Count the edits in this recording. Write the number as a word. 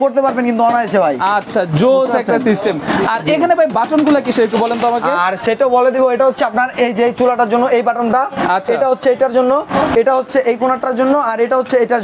zero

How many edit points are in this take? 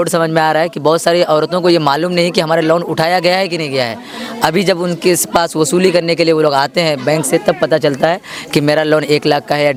zero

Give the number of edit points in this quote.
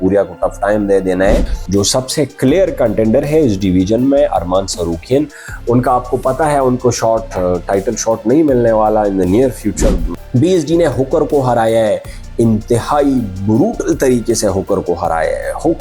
two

